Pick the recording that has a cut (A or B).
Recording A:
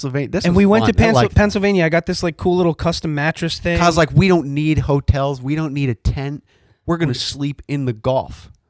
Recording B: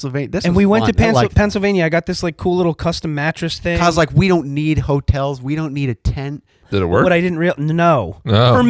B